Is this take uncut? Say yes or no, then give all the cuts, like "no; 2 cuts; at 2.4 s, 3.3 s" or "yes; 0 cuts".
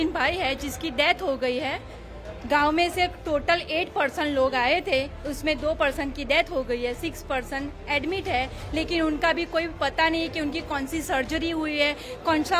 yes; 0 cuts